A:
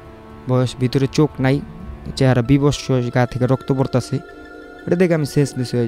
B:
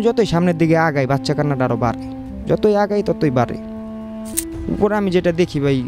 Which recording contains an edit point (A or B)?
B